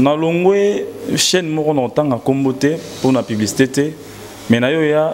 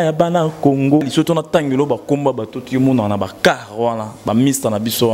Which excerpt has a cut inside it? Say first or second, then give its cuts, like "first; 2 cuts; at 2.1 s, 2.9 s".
second; 1 cut; at 1.1 s